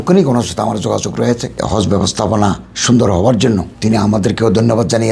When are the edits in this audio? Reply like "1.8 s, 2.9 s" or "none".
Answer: 1.5 s